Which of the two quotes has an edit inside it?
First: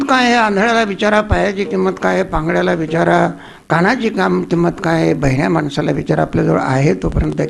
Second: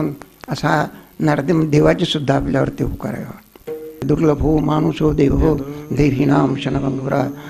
second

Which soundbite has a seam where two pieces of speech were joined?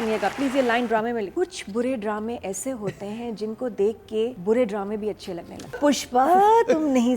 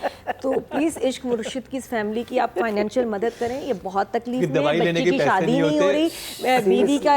first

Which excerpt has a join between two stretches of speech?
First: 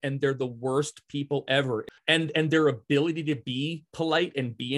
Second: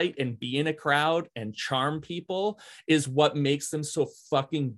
first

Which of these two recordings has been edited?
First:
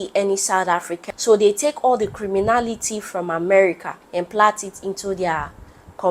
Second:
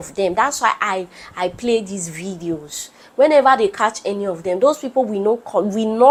first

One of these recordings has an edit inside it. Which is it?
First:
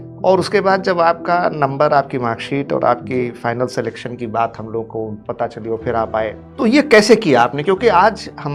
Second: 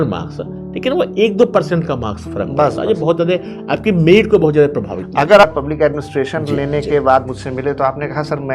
second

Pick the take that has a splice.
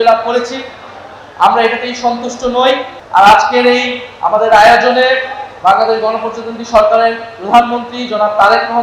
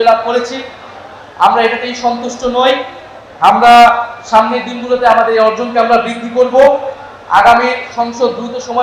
first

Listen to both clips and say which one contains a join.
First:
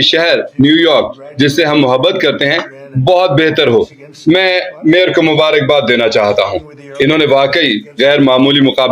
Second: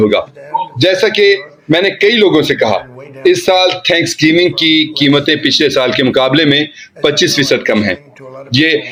first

